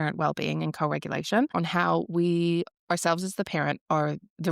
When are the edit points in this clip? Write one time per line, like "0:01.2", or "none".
0:01.5